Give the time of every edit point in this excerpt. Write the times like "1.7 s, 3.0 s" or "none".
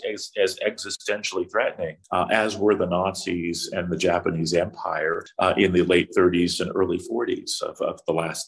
2.0 s, 5.2 s